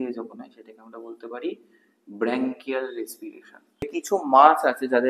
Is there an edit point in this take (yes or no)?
yes